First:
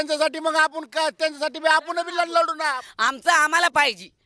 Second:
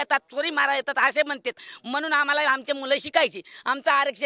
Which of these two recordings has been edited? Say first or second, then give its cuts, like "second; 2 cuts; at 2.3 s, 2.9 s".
first; 1 cut; at 2.9 s